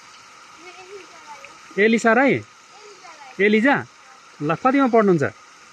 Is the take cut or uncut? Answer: uncut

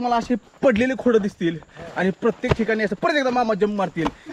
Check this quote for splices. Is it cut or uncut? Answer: uncut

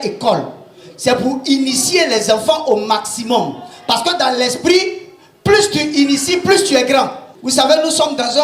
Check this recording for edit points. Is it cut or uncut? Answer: cut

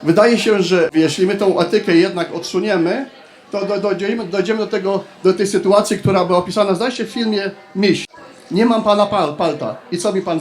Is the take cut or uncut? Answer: cut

